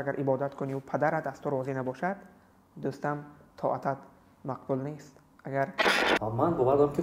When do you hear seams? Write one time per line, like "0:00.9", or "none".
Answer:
0:05.9